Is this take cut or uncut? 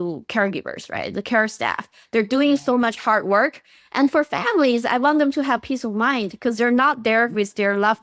uncut